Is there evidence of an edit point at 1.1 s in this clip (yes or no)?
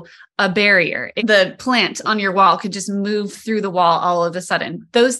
yes